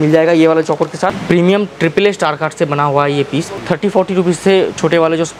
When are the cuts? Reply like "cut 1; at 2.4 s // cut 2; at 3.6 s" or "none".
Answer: cut 1; at 1.2 s // cut 2; at 3.5 s